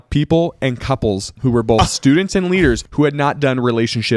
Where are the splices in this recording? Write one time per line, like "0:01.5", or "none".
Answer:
0:01.3
0:02.9